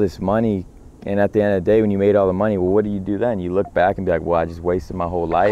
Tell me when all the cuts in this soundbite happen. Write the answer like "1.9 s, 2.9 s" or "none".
none